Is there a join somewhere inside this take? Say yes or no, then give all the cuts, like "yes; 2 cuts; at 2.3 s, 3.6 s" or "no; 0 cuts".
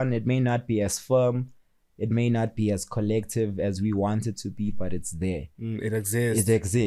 no; 0 cuts